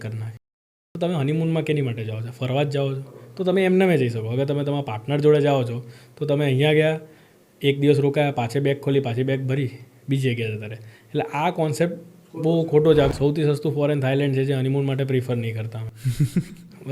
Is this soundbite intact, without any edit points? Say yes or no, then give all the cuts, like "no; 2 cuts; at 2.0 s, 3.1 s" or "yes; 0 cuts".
no; 1 cut; at 13.1 s